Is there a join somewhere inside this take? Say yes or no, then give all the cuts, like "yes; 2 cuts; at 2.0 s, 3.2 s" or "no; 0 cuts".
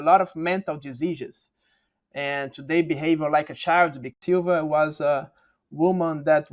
yes; 1 cut; at 4.1 s